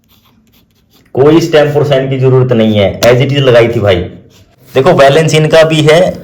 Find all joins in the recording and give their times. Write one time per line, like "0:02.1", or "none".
0:04.6